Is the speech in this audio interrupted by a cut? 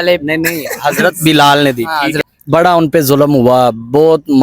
yes; 1 cut; at 2.2 s

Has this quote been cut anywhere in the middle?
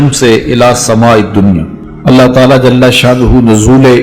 yes; 1 cut; at 1.9 s

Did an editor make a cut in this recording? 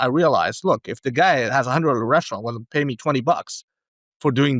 no; 0 cuts

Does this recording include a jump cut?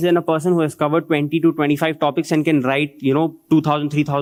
no; 0 cuts

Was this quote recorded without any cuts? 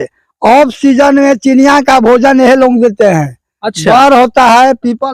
yes; 0 cuts

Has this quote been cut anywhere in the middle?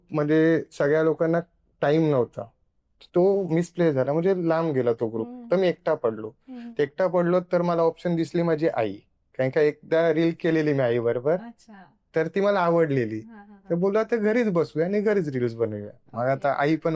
no; 0 cuts

